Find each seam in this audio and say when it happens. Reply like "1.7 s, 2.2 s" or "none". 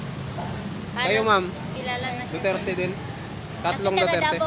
none